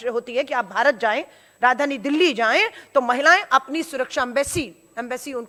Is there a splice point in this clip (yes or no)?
no